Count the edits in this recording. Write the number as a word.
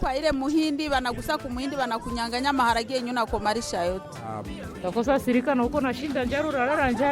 one